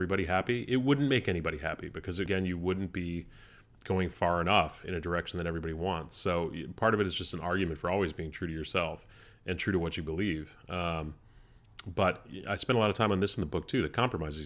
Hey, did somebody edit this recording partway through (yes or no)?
yes